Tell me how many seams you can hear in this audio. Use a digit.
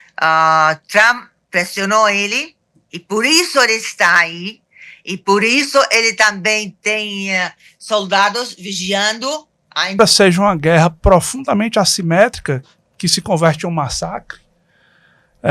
1